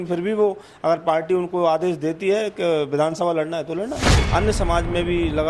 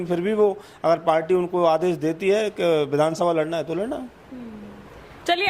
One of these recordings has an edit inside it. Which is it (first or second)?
first